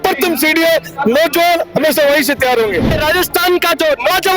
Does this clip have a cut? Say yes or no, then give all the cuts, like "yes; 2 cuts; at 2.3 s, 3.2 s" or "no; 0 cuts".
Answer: yes; 1 cut; at 3.0 s